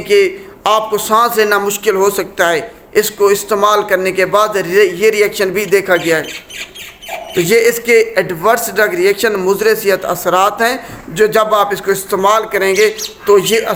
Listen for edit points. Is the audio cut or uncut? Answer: uncut